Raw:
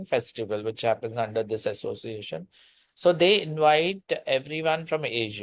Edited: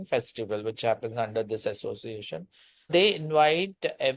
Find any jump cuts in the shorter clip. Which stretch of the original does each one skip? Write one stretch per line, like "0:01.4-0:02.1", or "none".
0:02.9-0:03.2